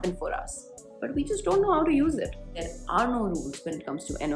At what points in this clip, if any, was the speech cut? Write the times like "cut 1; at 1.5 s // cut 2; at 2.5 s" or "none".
cut 1; at 2.6 s